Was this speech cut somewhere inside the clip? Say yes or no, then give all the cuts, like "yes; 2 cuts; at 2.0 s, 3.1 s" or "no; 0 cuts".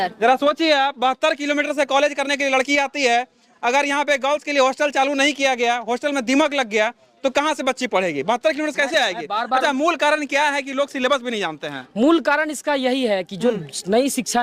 no; 0 cuts